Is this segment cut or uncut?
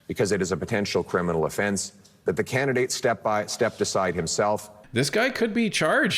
cut